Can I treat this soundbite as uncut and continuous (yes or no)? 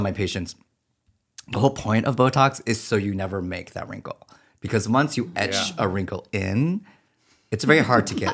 yes